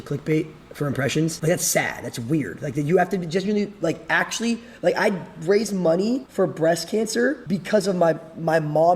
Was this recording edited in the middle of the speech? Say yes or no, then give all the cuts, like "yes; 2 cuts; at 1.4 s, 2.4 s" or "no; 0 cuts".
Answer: yes; 3 cuts; at 1.4 s, 6.3 s, 7.4 s